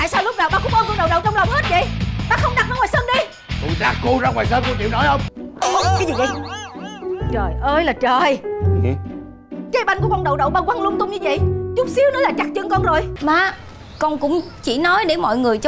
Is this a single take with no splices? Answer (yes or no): no